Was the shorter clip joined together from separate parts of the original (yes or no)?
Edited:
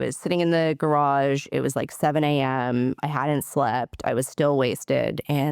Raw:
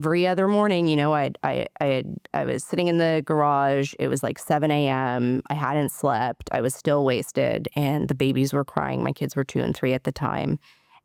no